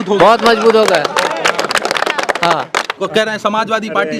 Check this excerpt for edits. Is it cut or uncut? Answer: cut